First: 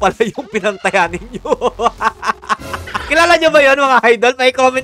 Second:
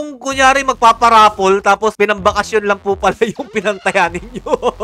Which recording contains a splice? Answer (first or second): first